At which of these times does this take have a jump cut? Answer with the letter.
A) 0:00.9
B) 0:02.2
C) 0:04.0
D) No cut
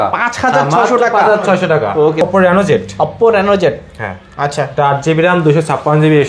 B